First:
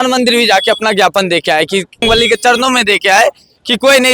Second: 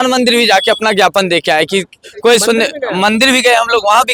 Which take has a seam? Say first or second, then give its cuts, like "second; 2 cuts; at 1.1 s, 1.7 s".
first; 1 cut; at 2.0 s